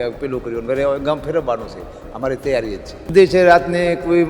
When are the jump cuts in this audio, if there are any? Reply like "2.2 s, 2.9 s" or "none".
3.1 s

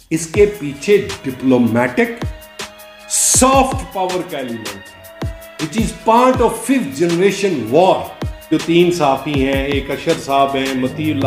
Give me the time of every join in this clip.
8.5 s

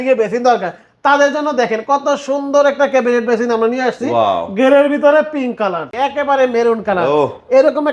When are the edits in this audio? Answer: 5.9 s

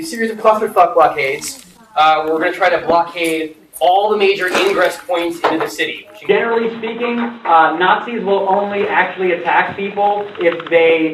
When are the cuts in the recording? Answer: 6.1 s

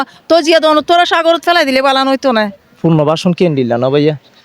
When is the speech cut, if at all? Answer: 2.8 s

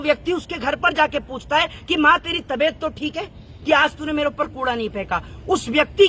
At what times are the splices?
none

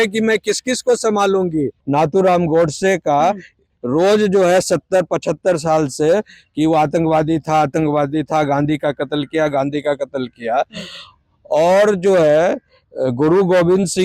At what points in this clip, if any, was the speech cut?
1.8 s

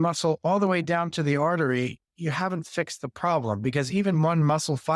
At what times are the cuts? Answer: none

